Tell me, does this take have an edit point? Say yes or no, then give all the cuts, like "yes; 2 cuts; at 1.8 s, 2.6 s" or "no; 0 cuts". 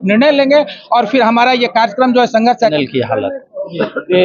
yes; 1 cut; at 2.7 s